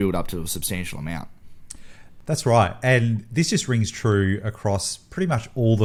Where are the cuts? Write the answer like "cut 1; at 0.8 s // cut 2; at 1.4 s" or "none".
none

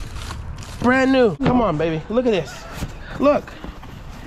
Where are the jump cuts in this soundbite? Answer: cut 1; at 1.4 s

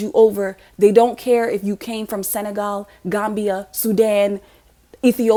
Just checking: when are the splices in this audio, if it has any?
none

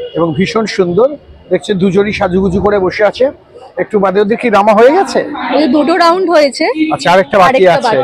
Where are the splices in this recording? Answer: none

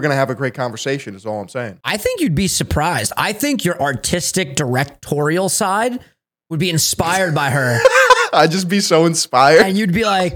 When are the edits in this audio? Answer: cut 1; at 1.8 s

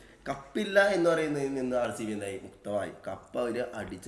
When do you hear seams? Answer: none

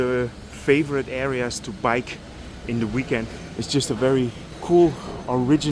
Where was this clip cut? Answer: cut 1; at 3.4 s // cut 2; at 4.5 s

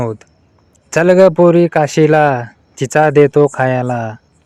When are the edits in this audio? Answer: none

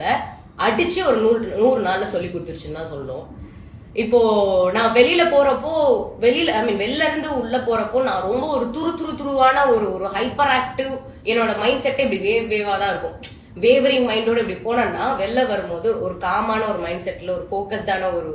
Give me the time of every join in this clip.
none

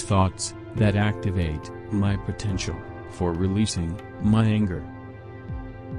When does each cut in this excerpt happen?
none

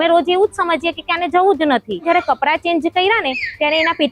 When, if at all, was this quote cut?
cut 1; at 2.0 s

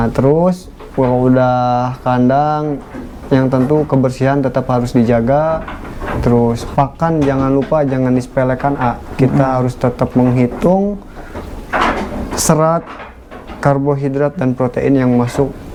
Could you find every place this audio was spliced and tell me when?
none

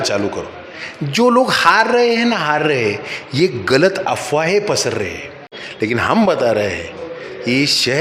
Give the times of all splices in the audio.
cut 1; at 5.5 s

